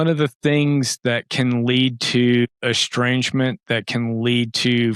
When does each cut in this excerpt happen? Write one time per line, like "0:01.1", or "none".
0:02.6